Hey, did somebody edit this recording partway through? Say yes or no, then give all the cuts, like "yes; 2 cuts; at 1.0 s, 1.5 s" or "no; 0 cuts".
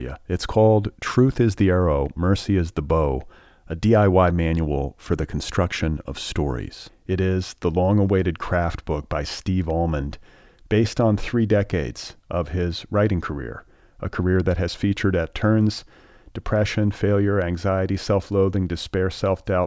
no; 0 cuts